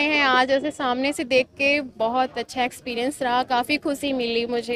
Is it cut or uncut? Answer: uncut